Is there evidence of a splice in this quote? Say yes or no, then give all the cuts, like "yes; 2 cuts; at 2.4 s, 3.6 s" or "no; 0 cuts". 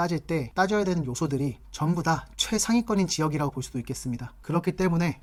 no; 0 cuts